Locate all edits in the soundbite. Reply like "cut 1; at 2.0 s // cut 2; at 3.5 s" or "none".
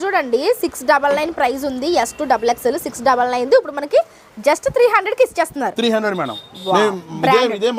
none